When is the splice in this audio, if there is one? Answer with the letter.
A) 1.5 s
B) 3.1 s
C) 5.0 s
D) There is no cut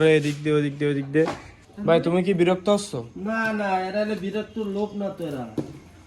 A